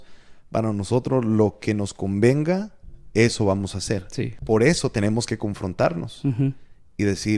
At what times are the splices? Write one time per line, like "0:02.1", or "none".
0:04.4